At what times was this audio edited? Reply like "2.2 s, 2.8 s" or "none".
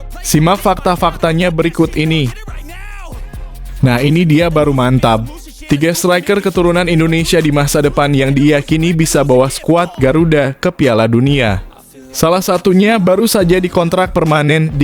2.5 s, 3.8 s